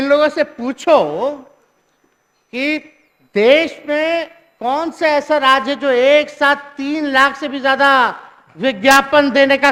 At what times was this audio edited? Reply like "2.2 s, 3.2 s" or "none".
none